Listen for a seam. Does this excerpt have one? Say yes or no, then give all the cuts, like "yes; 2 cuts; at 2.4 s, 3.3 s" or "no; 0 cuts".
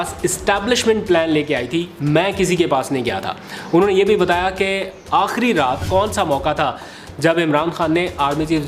yes; 1 cut; at 5.8 s